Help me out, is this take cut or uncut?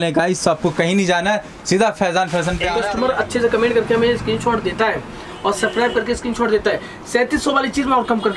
cut